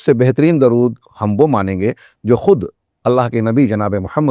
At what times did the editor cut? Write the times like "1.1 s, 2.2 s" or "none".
none

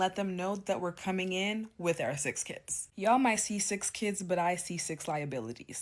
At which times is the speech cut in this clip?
none

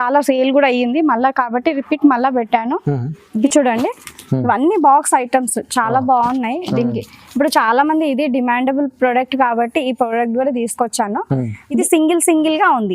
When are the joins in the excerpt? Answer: 3.3 s, 11.8 s

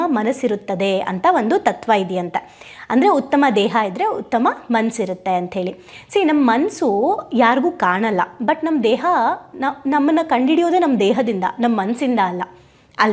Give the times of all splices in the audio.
none

